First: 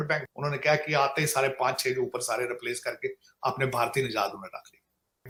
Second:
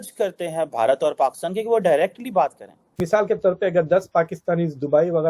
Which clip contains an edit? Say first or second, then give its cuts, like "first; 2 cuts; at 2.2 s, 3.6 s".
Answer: second; 1 cut; at 2.9 s